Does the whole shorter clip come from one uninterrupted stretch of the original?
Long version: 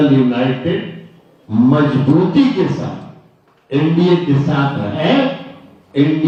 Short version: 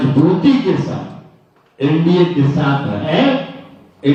yes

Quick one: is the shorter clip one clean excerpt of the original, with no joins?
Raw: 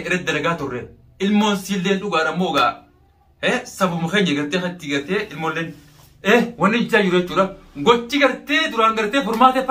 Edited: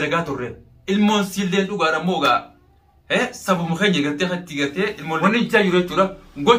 no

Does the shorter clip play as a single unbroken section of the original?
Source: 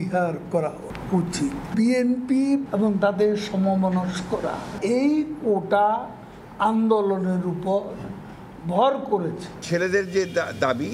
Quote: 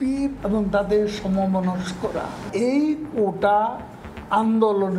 yes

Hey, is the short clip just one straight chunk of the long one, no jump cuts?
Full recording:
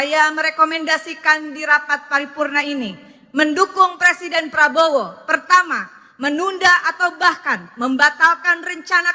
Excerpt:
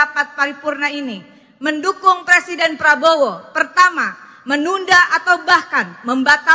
yes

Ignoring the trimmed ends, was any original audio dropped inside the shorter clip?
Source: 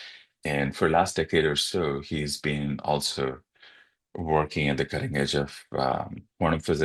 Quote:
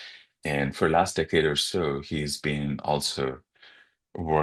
no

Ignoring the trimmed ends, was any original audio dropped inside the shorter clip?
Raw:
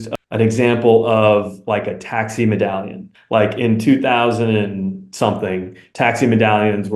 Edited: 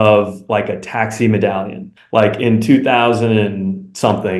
no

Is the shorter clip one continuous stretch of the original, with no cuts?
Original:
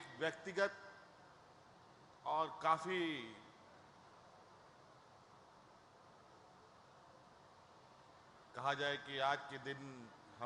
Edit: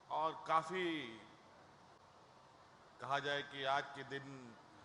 no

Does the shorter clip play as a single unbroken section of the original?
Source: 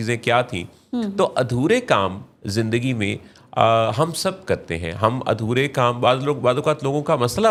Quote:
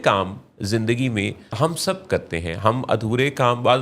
no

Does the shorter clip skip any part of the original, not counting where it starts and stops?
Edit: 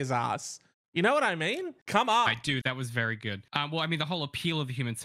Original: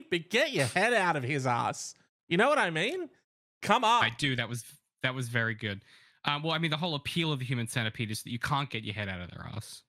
yes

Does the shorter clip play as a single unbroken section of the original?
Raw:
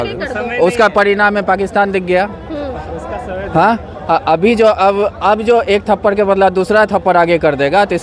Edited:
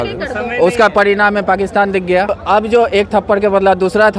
no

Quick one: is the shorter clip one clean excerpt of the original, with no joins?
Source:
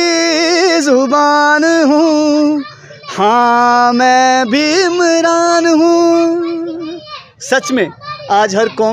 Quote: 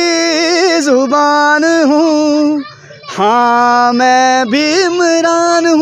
yes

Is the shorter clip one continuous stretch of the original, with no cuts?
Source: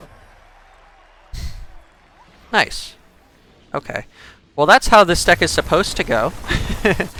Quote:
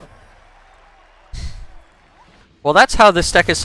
no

